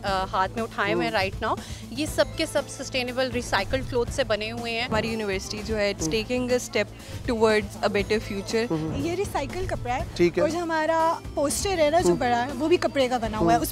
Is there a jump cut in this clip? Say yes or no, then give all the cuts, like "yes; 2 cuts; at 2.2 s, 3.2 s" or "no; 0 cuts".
yes; 2 cuts; at 4.9 s, 8.9 s